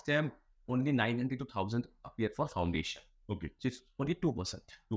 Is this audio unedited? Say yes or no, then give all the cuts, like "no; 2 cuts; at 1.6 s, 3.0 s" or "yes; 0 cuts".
yes; 0 cuts